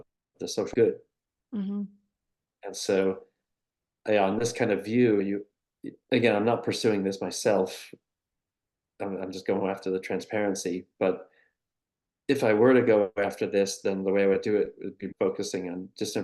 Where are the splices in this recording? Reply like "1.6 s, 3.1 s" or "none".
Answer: 15.1 s